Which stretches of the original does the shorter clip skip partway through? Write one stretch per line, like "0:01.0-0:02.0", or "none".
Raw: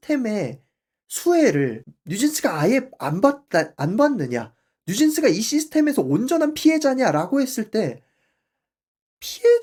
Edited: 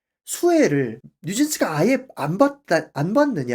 none